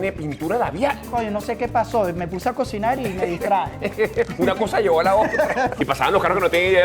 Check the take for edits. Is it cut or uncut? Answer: cut